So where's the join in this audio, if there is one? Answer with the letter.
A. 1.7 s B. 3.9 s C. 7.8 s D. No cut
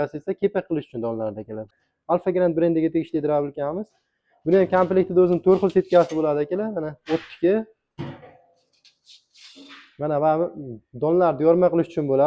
A